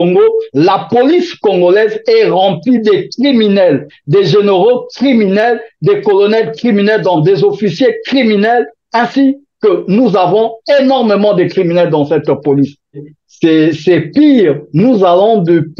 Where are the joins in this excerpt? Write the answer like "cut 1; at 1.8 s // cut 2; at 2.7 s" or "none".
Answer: cut 1; at 12.9 s

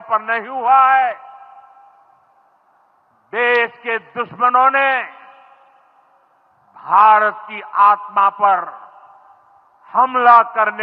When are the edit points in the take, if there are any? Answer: none

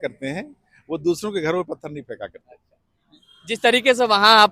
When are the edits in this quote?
none

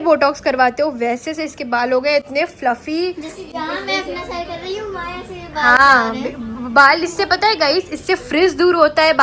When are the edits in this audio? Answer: none

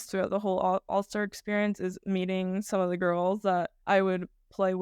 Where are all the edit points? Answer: cut 1; at 3.8 s

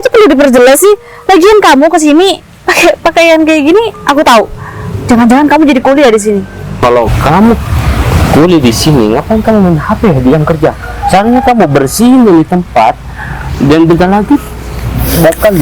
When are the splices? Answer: cut 1; at 6.8 s

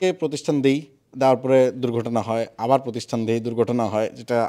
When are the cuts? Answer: none

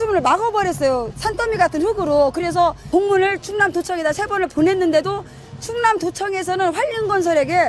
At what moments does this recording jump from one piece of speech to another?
cut 1; at 2.2 s

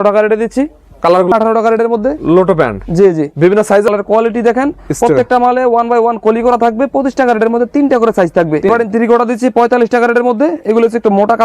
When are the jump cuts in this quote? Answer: cut 1; at 1.3 s // cut 2; at 3.9 s // cut 3; at 8.7 s

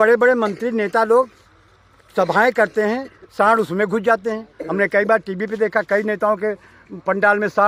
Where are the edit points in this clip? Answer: none

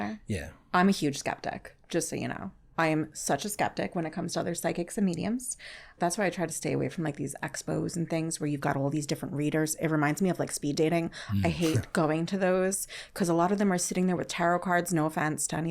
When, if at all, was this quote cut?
cut 1; at 5.9 s

